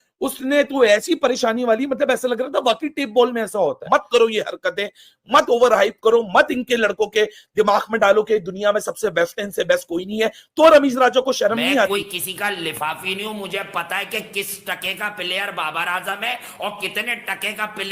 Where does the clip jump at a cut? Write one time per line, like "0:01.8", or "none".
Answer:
0:03.8